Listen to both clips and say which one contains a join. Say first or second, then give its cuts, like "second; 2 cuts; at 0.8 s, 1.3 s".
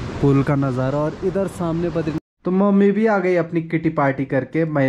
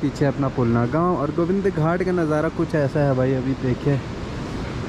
first; 1 cut; at 2.2 s